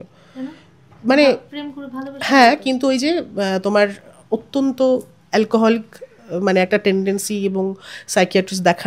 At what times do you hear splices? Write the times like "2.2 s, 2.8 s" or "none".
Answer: none

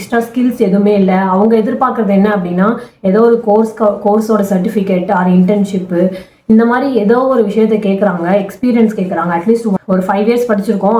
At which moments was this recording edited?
9.8 s

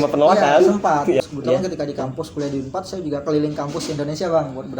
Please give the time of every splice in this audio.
1.2 s

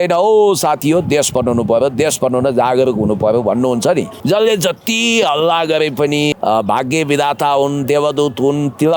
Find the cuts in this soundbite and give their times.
4.1 s, 6.3 s

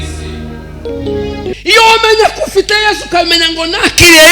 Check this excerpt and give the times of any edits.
1.5 s

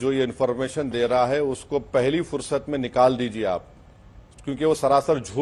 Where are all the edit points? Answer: none

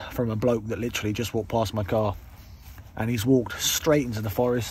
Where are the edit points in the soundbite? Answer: none

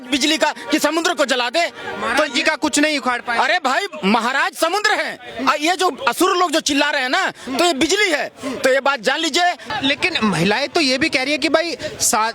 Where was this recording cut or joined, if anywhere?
none

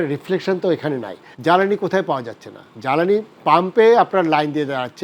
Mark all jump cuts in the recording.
1.2 s

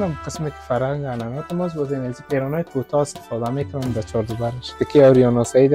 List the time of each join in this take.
4.8 s

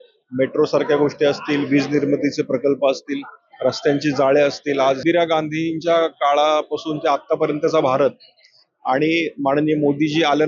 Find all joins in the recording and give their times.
5.0 s

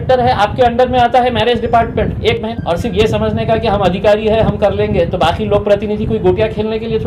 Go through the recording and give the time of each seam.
2.5 s

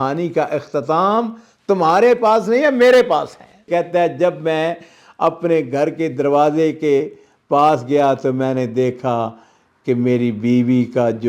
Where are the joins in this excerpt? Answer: 3.7 s

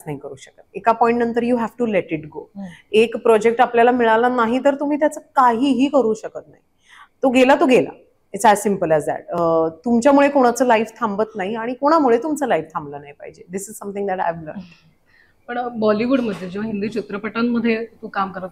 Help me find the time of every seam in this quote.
none

